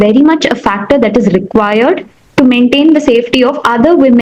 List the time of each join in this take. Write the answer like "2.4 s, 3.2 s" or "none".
none